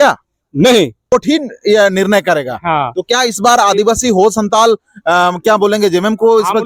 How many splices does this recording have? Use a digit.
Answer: 1